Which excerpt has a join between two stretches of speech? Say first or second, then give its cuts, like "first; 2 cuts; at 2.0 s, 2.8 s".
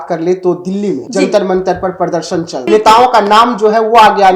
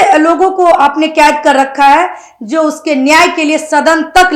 first; 2 cuts; at 1.0 s, 2.6 s